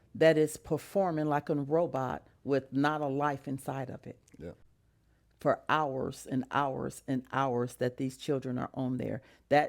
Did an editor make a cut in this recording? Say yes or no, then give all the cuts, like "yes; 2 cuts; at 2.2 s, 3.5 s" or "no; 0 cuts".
yes; 1 cut; at 4.6 s